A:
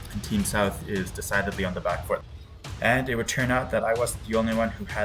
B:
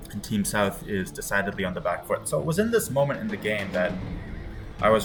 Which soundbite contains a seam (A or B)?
A